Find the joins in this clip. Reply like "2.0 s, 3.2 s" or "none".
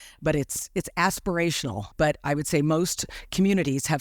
1.8 s